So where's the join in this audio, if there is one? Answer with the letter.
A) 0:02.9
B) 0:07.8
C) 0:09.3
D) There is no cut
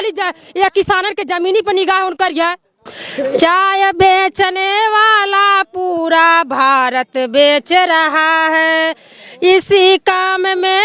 A